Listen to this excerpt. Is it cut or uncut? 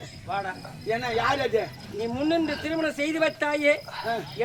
uncut